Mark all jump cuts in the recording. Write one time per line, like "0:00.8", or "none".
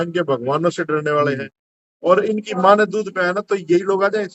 none

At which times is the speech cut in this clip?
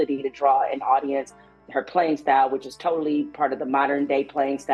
none

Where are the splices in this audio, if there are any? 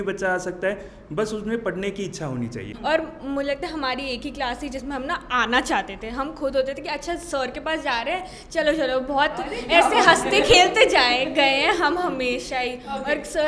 0:02.7

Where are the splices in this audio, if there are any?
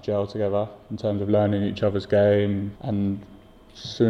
0:02.7

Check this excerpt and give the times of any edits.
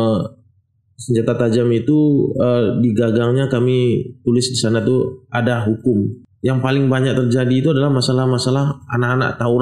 0:06.2

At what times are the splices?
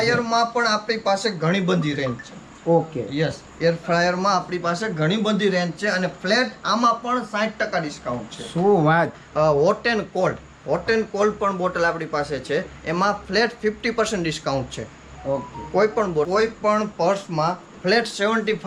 0:09.2
0:16.3

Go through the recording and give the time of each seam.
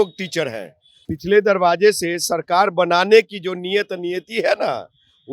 0:01.1

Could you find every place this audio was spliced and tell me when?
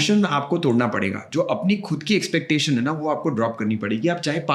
none

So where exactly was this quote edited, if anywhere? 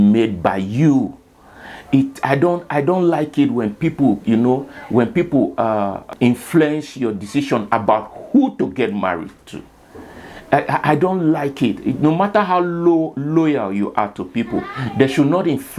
0:06.1

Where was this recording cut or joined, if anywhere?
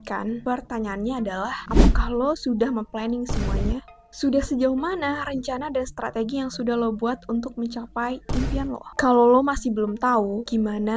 0:08.8

